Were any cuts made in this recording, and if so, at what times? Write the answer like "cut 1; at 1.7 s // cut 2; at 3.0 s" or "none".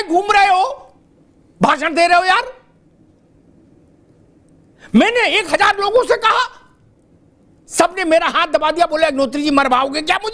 none

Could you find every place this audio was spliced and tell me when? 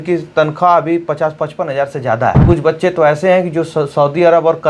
cut 1; at 2.4 s

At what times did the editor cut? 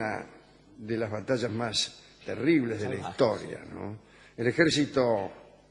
cut 1; at 2.4 s

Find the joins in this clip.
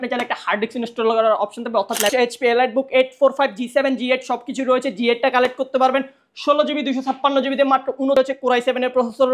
cut 1; at 2.1 s // cut 2; at 8.1 s

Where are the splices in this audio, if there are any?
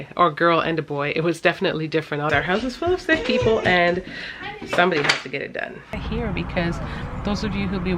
cut 1; at 2.3 s // cut 2; at 6.0 s

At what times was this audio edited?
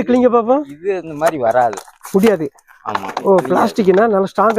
cut 1; at 1.9 s

